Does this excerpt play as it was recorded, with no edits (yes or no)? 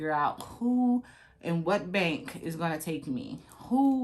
yes